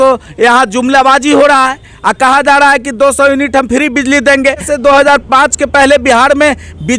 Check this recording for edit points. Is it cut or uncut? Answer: cut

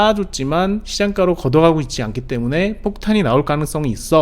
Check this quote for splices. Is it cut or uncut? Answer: uncut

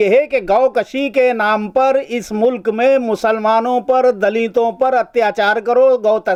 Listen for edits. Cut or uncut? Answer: uncut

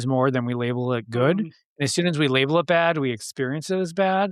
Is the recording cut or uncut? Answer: uncut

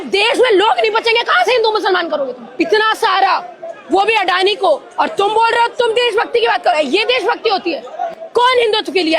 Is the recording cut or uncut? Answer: cut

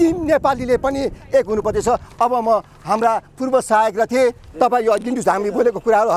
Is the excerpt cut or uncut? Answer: cut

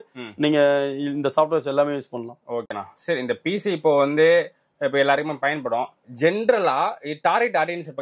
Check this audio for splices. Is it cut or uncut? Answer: uncut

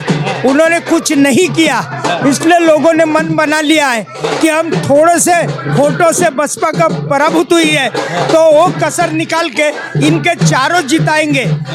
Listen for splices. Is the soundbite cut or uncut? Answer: uncut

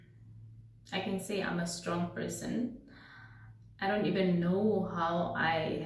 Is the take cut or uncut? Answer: uncut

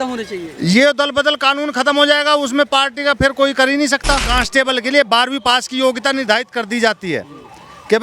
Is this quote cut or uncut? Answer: cut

